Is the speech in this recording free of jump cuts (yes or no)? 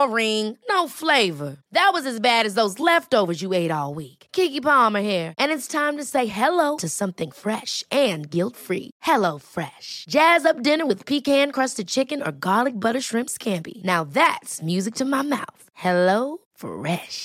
yes